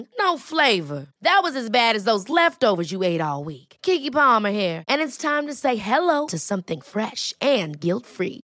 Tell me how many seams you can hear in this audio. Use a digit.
0